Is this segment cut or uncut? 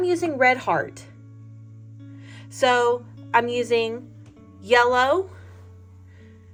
uncut